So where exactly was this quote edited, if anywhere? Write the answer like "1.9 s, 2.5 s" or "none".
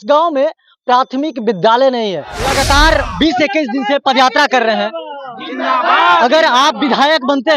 2.4 s